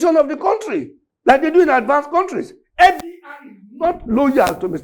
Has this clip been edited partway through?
yes; 1 cut; at 1.0 s

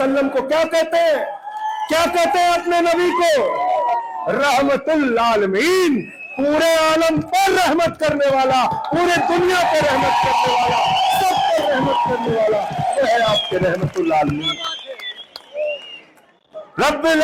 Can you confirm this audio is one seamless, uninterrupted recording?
yes; 0 cuts

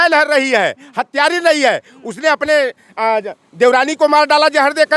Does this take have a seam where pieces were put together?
no; 0 cuts

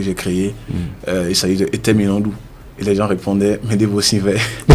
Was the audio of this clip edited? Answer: no; 0 cuts

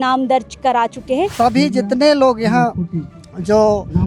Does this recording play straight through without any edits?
no; 1 cut; at 1.3 s

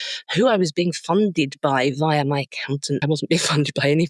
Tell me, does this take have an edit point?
yes; 1 cut; at 3.0 s

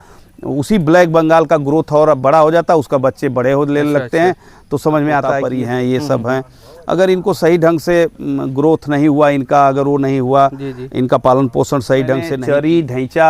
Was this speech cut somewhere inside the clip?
yes; 2 cuts; at 5.4 s, 12.3 s

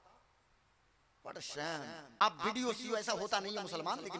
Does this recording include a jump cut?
yes; 1 cut; at 2.2 s

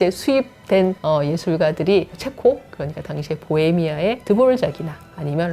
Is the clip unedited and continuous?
no; 3 cuts; at 1.0 s, 2.2 s, 4.2 s

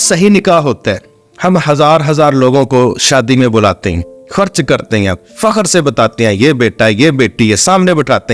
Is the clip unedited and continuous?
yes; 0 cuts

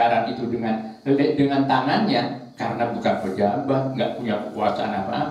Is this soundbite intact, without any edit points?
yes; 0 cuts

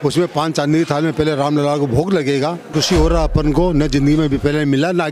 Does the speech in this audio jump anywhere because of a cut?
yes; 1 cut; at 2.7 s

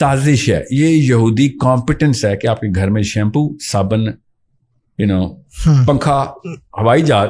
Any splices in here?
no; 0 cuts

